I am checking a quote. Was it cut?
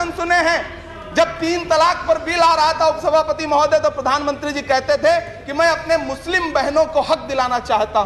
no; 0 cuts

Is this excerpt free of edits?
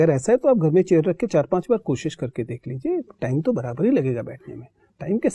yes; 0 cuts

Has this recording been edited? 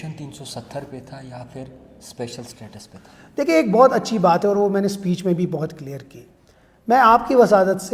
no; 0 cuts

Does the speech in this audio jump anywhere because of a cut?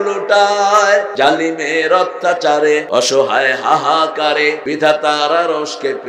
yes; 3 cuts; at 1.1 s, 2.9 s, 4.6 s

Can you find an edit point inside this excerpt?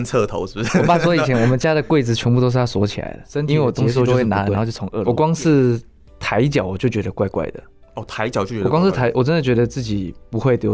yes; 1 cut; at 5.0 s

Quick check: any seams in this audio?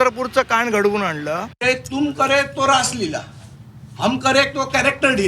yes; 1 cut; at 1.5 s

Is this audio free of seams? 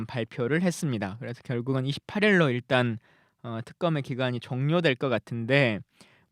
no; 1 cut; at 3.7 s

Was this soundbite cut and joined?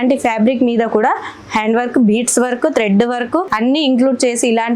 no; 0 cuts

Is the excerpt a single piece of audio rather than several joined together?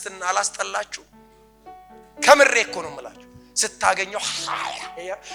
yes; 0 cuts

